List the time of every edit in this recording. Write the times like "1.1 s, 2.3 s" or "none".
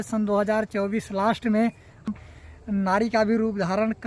2.1 s